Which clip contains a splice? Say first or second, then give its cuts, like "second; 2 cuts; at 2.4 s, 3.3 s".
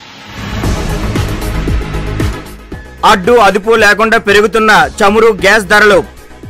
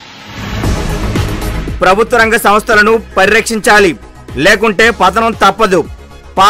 first; 2 cuts; at 1.6 s, 2.3 s